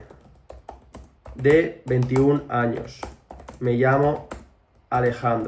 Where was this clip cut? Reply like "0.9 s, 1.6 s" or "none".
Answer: none